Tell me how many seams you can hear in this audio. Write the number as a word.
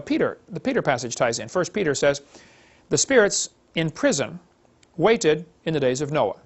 zero